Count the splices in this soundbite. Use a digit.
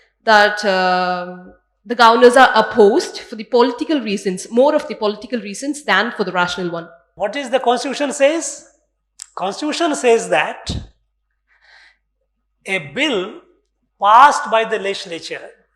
1